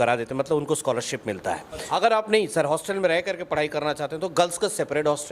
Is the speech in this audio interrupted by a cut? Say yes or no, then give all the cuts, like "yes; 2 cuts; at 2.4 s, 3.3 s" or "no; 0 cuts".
yes; 1 cut; at 1.8 s